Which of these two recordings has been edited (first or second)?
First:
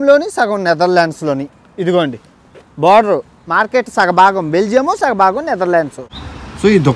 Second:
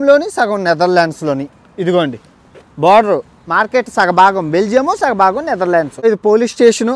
second